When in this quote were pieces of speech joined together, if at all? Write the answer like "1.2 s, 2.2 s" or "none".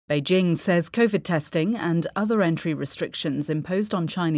1.1 s